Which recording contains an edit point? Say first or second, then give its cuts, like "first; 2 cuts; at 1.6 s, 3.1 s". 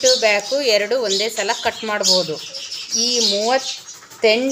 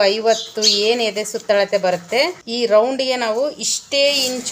second; 1 cut; at 2.4 s